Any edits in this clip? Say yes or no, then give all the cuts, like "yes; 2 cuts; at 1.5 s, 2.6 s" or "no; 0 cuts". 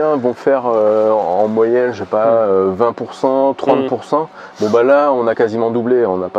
no; 0 cuts